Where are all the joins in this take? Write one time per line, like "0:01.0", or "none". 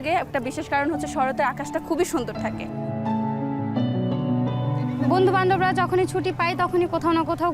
none